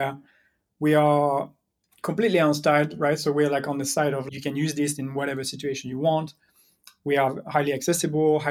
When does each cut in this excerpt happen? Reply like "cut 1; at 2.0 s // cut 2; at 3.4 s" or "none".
cut 1; at 4.3 s